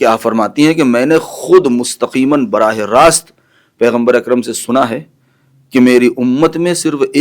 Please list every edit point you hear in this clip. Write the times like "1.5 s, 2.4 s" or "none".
none